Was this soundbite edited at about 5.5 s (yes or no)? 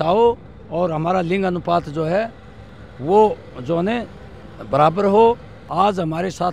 yes